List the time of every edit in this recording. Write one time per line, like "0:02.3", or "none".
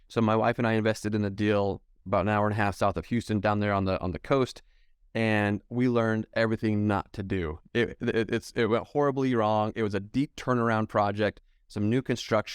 none